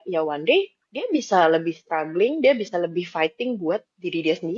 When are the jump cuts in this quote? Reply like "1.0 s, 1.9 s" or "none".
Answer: none